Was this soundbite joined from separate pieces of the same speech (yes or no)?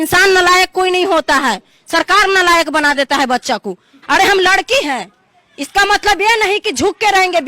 yes